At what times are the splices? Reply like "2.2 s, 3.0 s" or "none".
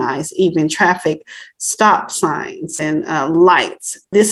none